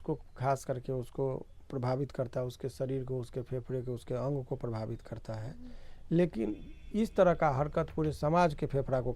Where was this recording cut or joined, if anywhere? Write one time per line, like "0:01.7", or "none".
none